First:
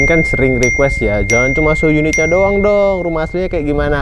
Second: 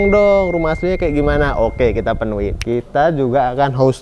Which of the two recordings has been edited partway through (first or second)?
second